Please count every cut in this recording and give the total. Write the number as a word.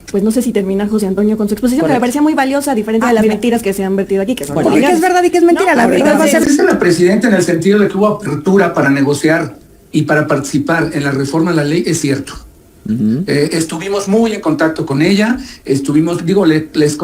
one